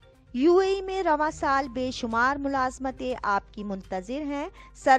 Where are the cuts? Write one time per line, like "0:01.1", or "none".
none